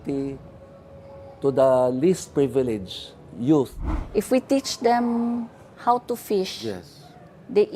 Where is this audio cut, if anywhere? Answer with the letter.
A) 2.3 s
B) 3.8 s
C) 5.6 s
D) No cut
B